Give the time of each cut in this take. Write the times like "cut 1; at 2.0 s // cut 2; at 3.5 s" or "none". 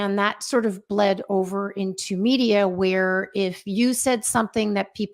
none